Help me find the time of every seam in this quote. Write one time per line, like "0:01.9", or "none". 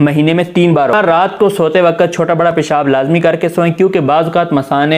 0:00.9

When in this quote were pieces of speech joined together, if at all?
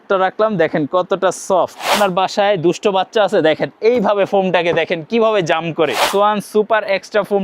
0:01.9
0:06.0

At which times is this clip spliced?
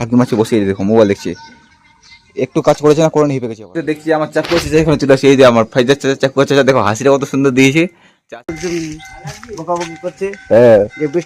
0:03.6
0:08.1

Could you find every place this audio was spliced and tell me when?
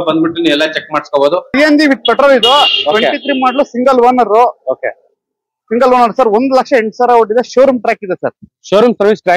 0:01.5

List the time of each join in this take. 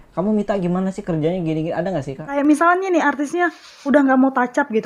0:02.4

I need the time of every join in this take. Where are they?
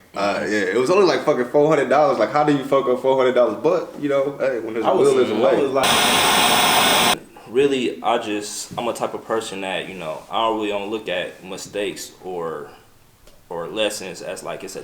0:05.8
0:07.3

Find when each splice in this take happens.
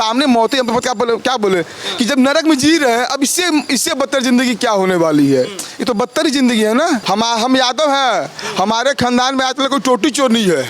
0:07.0

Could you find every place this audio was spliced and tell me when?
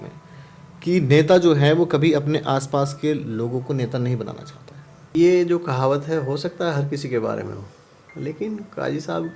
0:05.1

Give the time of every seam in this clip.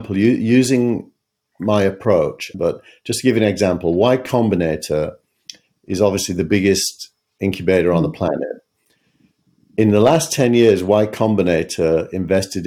0:02.5

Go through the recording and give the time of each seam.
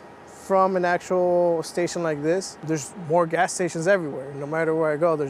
0:02.6

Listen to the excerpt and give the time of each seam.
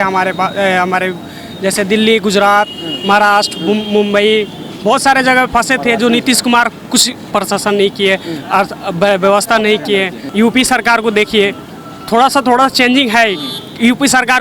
0:10.2

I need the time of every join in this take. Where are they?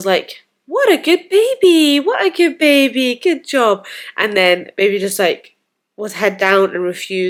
none

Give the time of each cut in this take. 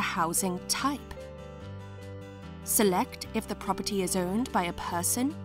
none

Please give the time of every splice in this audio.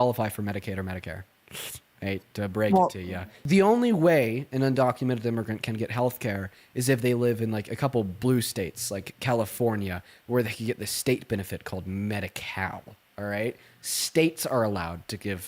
0:03.3

